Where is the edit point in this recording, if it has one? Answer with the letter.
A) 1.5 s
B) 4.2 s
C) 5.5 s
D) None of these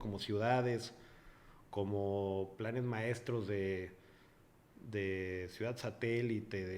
D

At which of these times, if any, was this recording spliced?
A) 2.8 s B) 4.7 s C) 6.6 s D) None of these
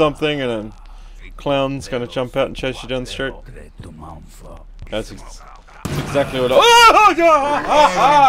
B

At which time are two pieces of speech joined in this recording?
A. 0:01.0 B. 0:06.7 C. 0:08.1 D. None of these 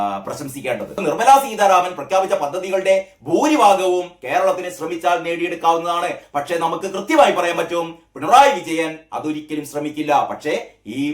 A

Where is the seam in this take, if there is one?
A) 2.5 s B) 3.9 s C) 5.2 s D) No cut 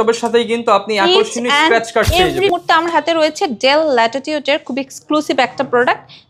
A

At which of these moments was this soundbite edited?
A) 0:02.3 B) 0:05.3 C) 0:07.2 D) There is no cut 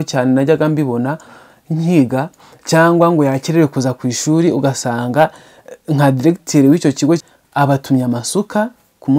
C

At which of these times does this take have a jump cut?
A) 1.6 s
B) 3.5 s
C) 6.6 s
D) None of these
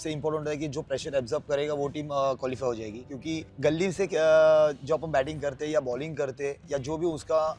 B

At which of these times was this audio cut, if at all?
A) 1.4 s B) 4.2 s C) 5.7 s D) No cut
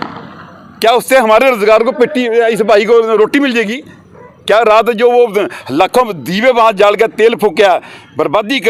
D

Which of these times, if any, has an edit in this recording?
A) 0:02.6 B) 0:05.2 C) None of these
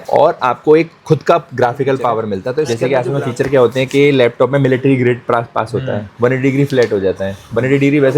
A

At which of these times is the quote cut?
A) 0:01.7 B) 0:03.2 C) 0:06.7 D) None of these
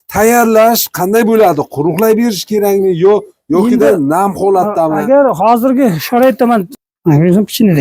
C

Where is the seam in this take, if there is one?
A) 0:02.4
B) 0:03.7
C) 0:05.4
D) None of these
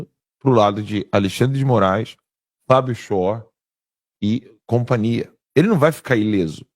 C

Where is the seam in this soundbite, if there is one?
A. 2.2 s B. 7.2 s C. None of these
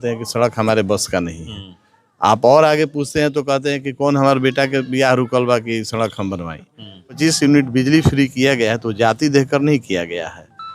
B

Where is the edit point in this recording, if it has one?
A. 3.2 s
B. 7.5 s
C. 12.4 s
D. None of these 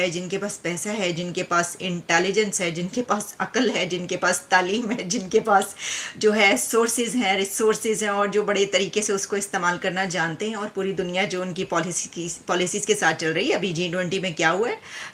D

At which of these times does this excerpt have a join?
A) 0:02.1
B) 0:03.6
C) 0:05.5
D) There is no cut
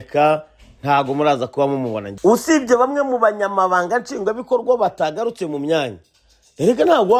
A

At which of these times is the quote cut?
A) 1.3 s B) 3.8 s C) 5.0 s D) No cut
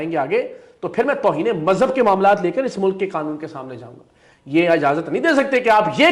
D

